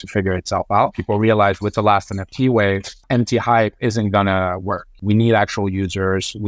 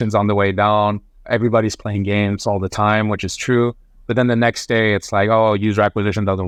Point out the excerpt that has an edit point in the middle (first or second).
first